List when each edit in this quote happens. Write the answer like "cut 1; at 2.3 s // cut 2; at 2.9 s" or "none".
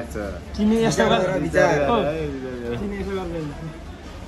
none